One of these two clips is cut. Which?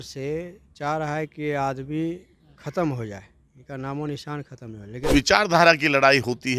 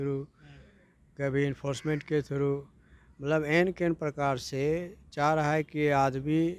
first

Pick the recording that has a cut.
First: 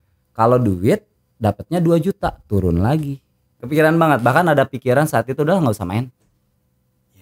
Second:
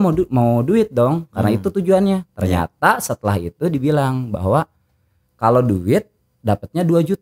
first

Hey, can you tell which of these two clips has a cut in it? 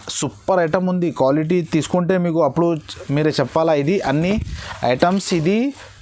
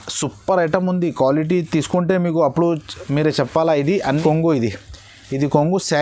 second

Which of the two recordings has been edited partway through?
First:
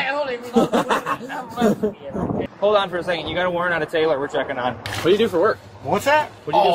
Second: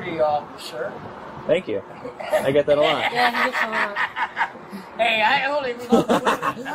first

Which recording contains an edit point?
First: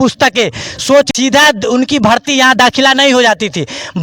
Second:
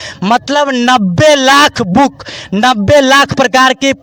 first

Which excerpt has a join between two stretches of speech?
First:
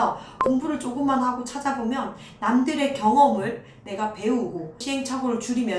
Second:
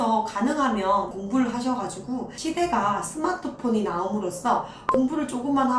second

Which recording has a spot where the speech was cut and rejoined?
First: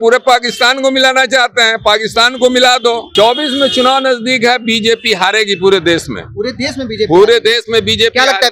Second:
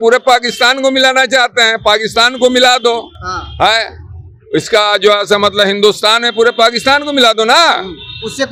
first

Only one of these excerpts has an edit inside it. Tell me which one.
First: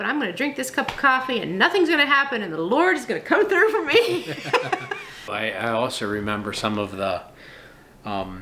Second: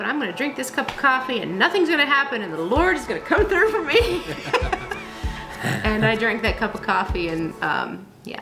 first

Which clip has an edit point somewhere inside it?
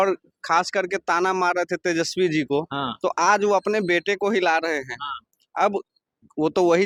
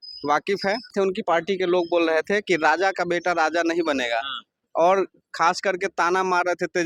second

